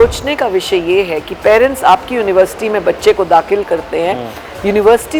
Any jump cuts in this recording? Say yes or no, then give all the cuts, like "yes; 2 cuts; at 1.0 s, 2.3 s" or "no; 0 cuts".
no; 0 cuts